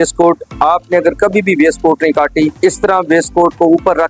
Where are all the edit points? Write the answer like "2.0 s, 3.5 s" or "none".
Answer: 2.5 s